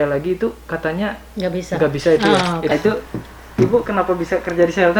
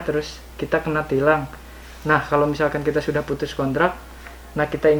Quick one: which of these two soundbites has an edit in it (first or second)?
first